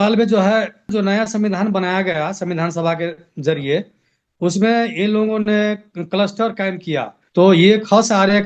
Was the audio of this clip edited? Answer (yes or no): yes